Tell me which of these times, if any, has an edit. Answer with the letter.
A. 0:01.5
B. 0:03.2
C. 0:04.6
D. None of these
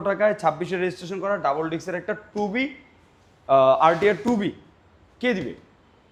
D